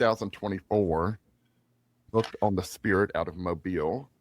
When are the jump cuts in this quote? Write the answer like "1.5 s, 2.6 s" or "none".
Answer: 2.1 s